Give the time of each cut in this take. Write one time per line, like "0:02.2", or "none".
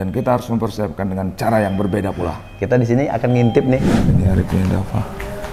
0:04.0

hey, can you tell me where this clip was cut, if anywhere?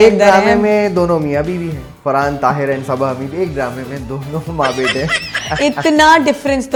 none

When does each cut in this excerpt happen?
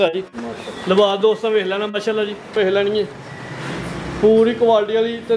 0:02.6

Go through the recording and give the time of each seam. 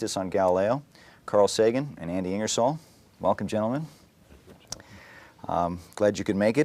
0:02.9

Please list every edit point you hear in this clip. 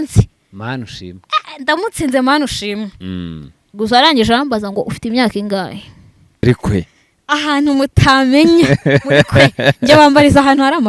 0:06.4

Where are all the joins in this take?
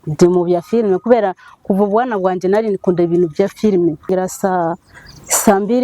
0:04.1

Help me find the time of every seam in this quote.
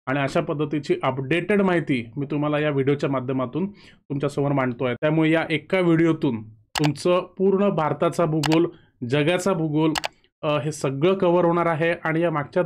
0:05.0

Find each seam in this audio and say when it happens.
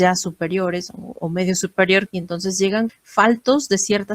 0:02.5

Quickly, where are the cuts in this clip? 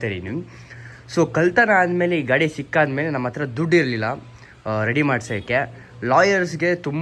none

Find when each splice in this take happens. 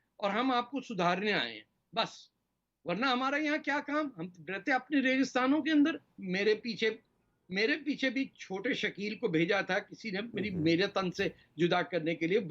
none

